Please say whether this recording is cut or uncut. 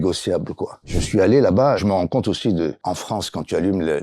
cut